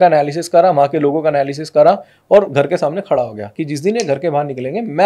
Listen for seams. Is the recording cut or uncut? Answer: uncut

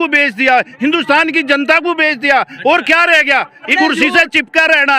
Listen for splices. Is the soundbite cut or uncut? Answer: cut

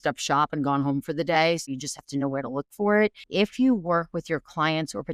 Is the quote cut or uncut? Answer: cut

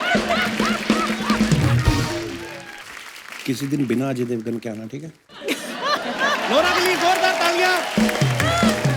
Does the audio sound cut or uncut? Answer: cut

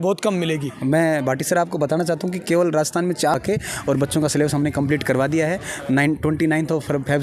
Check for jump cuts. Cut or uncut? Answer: cut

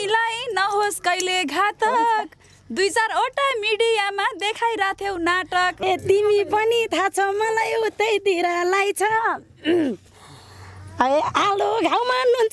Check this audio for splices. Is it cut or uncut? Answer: cut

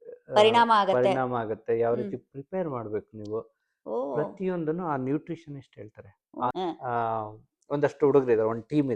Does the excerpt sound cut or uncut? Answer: cut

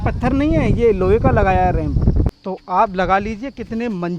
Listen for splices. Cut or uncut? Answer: cut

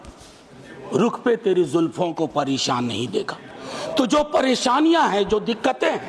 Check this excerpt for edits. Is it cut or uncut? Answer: uncut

